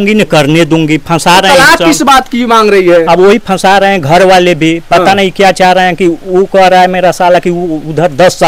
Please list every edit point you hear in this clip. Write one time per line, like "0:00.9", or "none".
none